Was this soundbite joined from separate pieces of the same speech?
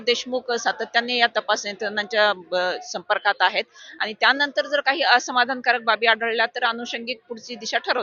no; 0 cuts

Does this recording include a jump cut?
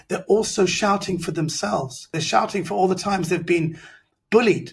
yes; 1 cut; at 2.1 s

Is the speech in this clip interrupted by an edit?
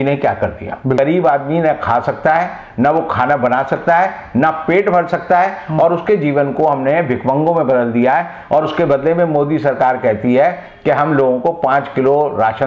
yes; 1 cut; at 1.0 s

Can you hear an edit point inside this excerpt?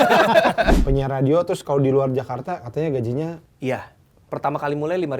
yes; 3 cuts; at 0.8 s, 3.5 s, 4.3 s

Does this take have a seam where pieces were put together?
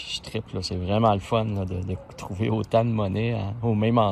no; 0 cuts

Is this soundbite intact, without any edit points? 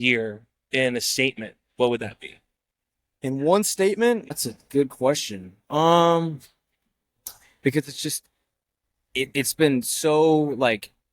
no; 1 cut; at 4.3 s

